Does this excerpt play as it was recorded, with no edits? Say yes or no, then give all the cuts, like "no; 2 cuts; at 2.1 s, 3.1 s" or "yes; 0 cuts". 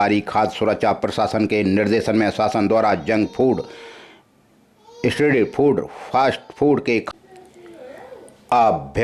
no; 1 cut; at 7.1 s